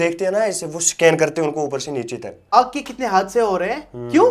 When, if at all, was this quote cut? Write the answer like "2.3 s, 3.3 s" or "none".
2.5 s